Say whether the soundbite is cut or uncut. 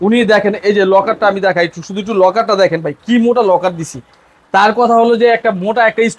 uncut